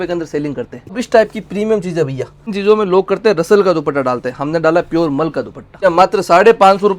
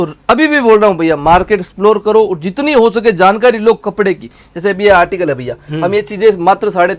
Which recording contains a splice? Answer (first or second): first